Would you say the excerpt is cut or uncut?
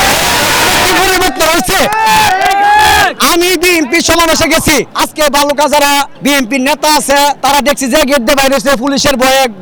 uncut